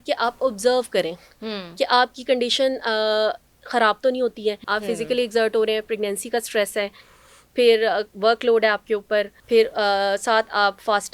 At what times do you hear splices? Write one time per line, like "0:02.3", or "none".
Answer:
0:04.6
0:09.4